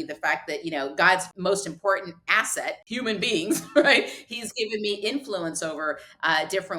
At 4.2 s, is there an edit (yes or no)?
no